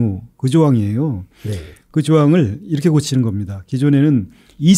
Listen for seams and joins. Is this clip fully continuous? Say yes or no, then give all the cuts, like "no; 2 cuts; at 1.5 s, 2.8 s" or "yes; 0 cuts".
yes; 0 cuts